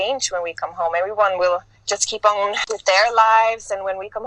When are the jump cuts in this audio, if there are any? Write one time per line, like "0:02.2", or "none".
0:02.6